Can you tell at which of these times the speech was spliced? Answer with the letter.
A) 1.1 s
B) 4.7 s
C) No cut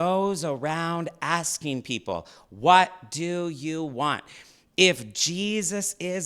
C